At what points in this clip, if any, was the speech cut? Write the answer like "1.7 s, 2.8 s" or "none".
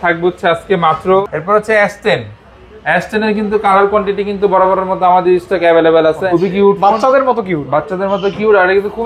1.2 s, 6.2 s